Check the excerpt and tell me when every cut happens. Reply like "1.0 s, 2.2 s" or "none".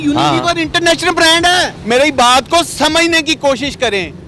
1.8 s